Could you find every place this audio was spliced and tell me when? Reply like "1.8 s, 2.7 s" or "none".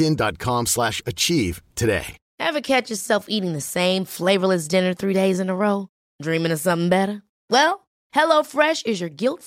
2.2 s

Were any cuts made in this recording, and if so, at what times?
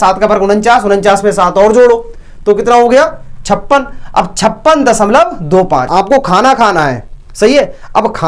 5.9 s

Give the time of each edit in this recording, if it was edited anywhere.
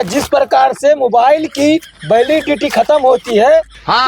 none

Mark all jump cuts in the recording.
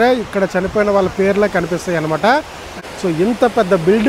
2.7 s

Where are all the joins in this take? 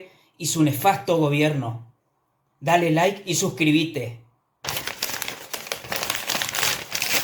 none

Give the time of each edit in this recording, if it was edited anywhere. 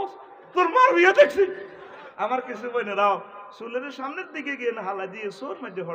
2.0 s

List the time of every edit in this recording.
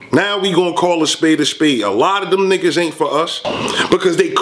3.5 s

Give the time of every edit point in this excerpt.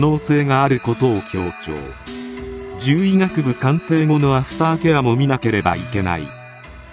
none

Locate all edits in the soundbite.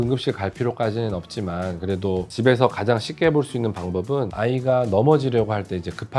4.3 s

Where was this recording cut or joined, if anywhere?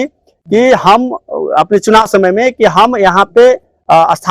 none

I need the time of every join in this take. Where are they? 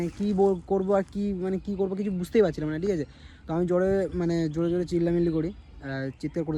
none

